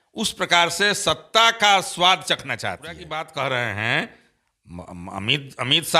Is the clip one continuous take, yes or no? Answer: no